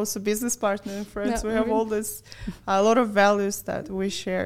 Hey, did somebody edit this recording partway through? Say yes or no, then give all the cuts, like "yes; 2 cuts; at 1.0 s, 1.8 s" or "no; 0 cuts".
no; 0 cuts